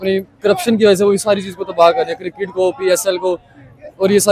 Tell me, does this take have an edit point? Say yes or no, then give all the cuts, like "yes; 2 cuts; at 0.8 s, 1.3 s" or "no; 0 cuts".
no; 0 cuts